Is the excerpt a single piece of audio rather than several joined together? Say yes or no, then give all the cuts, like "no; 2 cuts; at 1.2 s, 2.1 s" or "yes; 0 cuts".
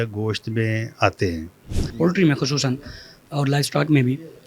no; 1 cut; at 1.8 s